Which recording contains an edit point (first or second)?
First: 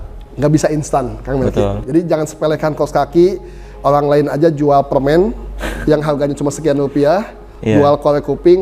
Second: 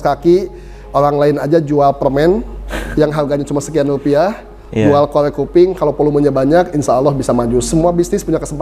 first